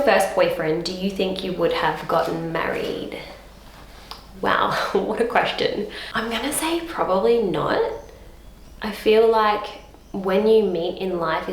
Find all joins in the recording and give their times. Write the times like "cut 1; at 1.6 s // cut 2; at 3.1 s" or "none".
none